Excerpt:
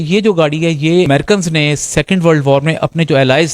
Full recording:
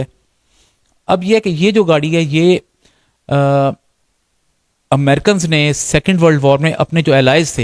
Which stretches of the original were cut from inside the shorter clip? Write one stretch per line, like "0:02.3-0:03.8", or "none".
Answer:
0:02.6-0:05.0